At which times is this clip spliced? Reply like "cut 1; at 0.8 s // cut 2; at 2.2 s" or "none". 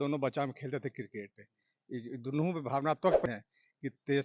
cut 1; at 3.3 s